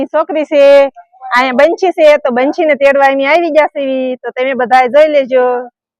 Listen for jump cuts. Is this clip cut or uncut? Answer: uncut